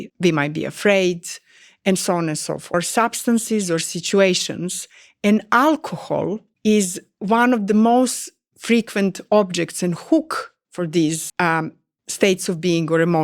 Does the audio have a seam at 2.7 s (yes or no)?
yes